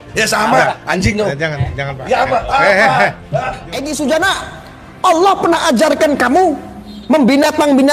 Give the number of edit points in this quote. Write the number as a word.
one